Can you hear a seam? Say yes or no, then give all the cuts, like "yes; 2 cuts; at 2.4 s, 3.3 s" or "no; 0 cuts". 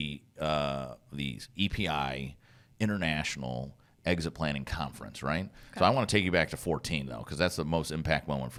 no; 0 cuts